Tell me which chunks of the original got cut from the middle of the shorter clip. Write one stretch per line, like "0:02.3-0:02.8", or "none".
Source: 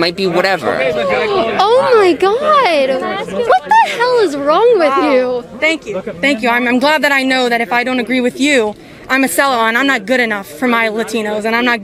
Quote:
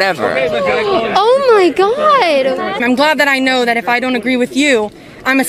0:03.2-0:06.6